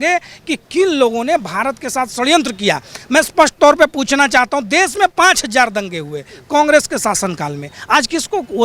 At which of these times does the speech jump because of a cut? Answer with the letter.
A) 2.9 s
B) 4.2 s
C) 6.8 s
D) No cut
D